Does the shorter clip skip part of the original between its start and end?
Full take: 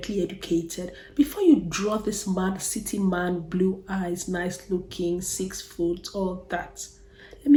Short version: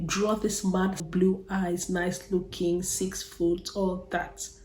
yes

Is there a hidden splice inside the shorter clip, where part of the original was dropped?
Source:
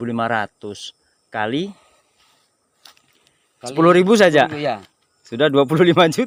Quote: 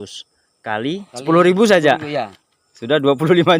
yes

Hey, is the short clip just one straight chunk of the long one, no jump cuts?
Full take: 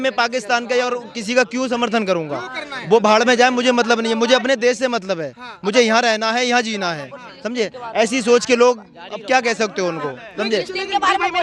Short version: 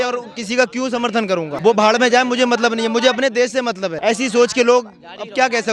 no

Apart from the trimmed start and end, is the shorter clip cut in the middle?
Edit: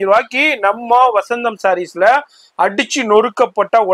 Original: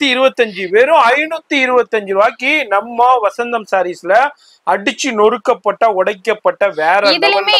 no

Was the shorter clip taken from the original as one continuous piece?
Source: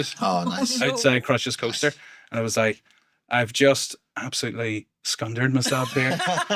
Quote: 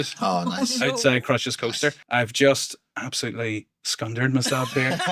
no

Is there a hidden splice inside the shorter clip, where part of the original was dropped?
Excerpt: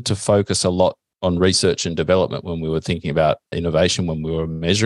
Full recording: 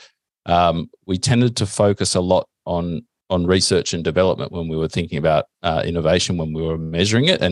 yes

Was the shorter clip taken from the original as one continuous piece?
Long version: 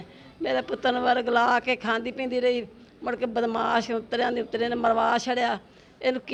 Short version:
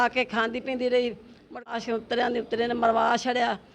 no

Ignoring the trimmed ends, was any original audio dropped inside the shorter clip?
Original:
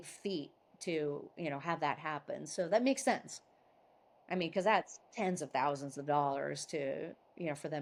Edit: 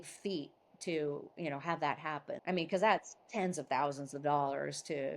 yes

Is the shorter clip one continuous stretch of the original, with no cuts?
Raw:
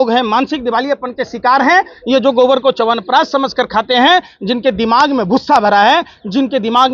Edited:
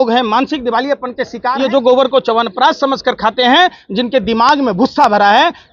no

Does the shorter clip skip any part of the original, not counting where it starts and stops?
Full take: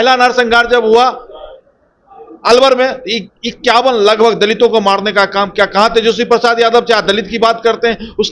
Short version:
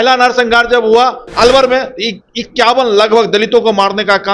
yes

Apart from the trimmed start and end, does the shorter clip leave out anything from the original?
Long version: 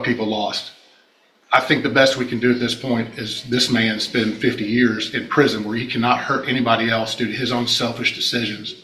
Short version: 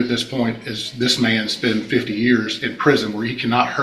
no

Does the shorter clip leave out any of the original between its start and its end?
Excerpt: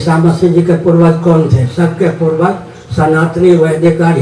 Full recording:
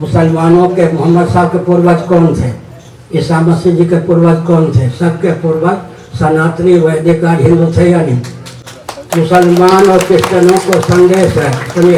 no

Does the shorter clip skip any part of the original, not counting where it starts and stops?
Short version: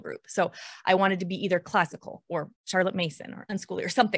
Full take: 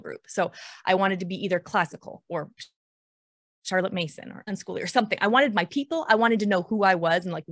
yes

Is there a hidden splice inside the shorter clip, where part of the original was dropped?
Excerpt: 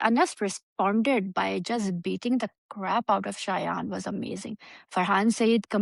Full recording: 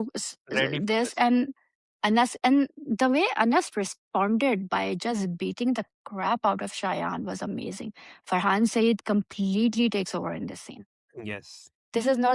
no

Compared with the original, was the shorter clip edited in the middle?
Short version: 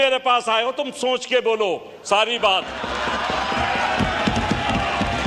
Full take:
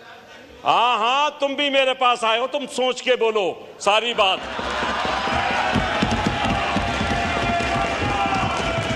no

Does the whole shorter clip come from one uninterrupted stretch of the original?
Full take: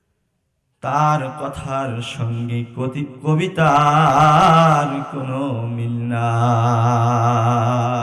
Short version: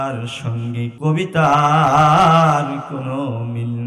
no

